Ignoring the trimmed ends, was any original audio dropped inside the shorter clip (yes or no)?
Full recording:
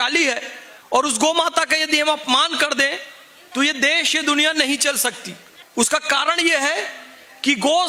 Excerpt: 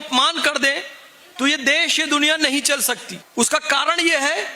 yes